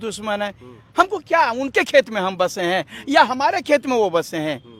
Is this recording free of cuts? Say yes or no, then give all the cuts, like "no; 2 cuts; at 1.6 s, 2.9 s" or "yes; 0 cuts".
yes; 0 cuts